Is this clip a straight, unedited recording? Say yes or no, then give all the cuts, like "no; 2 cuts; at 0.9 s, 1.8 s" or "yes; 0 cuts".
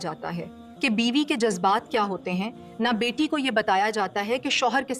yes; 0 cuts